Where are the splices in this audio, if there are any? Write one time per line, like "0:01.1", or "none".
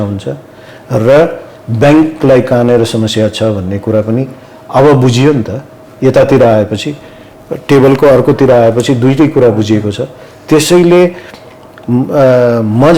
none